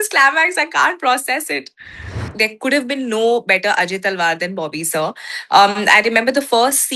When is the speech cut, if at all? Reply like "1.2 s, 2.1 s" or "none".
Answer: 2.3 s